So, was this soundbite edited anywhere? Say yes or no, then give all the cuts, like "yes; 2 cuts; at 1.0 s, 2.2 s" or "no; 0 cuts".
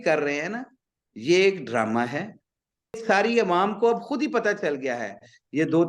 yes; 1 cut; at 3.0 s